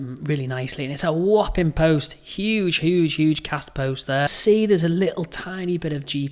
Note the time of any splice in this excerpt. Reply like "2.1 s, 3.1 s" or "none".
4.3 s

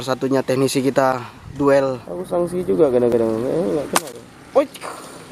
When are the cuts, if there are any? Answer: 2.1 s

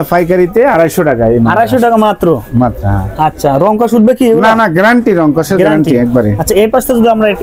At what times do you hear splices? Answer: none

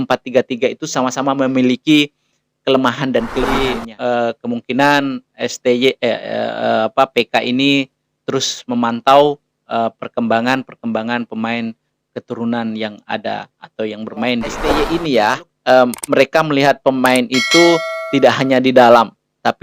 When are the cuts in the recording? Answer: 3.5 s, 14.8 s

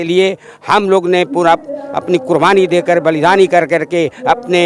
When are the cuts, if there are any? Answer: none

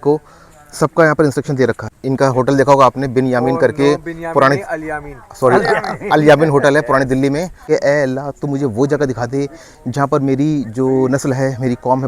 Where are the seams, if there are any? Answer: 1.9 s, 7.6 s

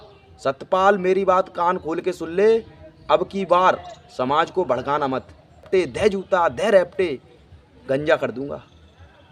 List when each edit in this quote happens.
5.7 s

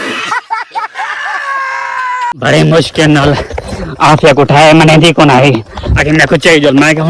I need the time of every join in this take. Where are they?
none

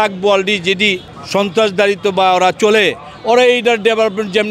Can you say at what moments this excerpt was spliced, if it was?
1.1 s

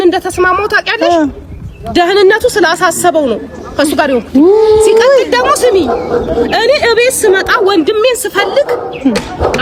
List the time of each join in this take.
none

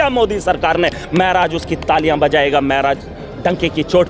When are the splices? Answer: none

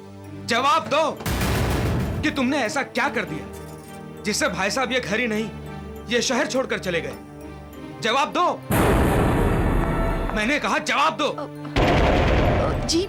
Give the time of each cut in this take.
none

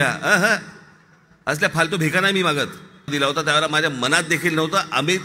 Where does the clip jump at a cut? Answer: 3.1 s

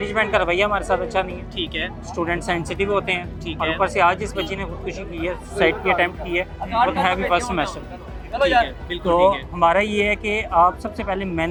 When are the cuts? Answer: none

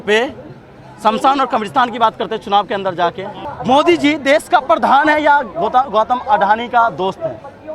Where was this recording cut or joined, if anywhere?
3.4 s

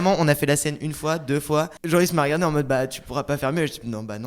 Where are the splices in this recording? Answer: 1.8 s

